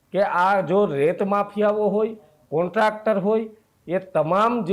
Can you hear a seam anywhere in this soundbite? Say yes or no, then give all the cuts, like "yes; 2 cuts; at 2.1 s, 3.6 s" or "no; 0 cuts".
no; 0 cuts